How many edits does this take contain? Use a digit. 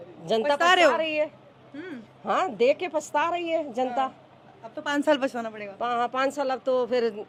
0